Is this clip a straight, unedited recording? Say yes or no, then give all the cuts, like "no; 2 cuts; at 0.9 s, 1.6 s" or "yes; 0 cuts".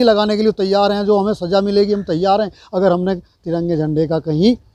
yes; 0 cuts